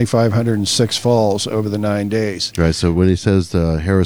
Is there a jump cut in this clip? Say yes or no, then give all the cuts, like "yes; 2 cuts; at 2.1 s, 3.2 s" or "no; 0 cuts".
no; 0 cuts